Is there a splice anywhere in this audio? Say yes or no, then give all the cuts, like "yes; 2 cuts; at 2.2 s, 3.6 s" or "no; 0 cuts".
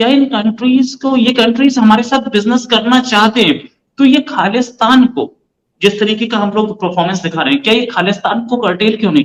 no; 0 cuts